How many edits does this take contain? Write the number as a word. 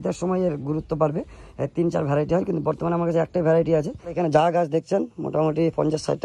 one